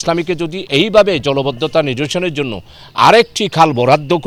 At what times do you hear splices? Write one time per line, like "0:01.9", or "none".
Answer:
none

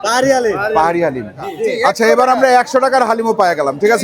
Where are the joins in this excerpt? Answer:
0:01.5

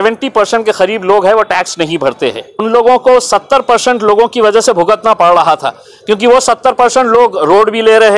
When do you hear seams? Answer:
0:02.5

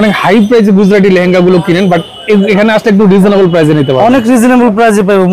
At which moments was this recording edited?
none

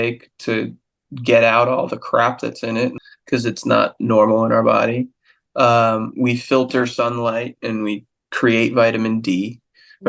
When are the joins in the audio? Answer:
0:03.0

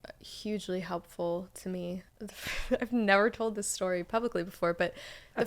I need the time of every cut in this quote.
0:02.1

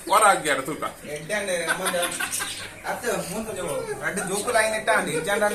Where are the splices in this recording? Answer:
none

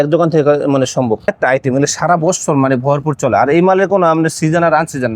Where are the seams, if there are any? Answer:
0:01.3

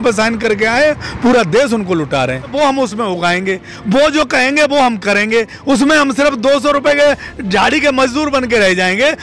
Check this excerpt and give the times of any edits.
0:02.5

